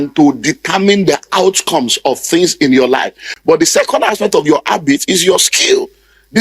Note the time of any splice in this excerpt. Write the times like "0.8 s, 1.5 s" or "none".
3.3 s